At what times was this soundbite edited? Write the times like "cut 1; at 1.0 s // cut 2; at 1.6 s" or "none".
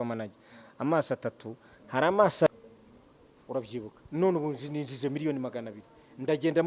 cut 1; at 2.5 s